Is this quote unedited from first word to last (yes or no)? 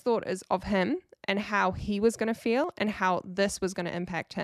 yes